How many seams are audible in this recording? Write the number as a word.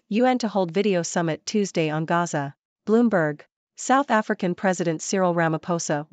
zero